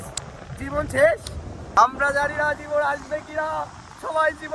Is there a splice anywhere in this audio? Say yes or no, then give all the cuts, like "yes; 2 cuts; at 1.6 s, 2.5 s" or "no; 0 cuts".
no; 0 cuts